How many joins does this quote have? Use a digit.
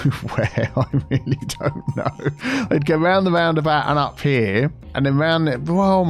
1